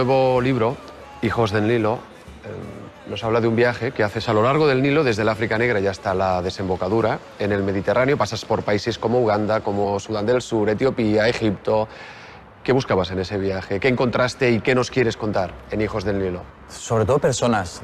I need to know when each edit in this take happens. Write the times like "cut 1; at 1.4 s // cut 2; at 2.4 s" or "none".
cut 1; at 4.4 s